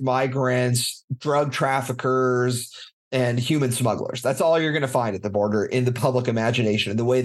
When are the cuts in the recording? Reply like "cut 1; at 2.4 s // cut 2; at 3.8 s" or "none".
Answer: none